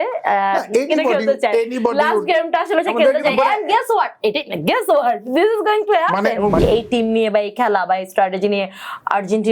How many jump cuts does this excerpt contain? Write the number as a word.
one